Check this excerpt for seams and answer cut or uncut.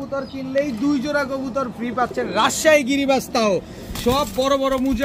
uncut